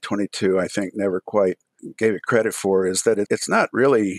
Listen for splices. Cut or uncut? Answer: cut